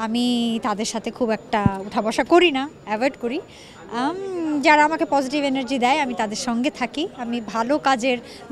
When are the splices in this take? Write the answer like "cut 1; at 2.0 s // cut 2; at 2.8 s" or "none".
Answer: none